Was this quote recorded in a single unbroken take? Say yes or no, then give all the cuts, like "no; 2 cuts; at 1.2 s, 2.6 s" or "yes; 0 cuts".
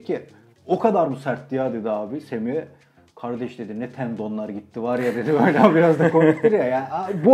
yes; 0 cuts